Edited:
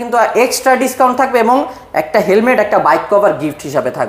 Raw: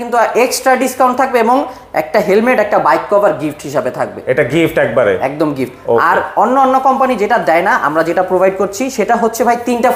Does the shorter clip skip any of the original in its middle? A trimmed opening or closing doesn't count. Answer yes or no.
no